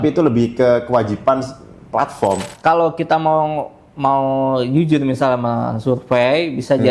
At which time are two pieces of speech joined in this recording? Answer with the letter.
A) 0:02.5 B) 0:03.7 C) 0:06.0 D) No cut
A